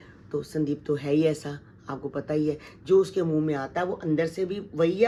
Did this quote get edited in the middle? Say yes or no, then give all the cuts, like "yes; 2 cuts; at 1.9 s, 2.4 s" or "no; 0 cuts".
no; 0 cuts